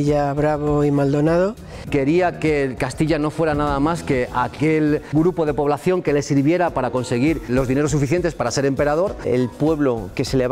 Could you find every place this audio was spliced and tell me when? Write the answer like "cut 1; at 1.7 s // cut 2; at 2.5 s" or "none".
cut 1; at 1.7 s // cut 2; at 9.2 s